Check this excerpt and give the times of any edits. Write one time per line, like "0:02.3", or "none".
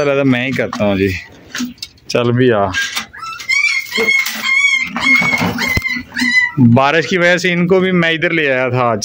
none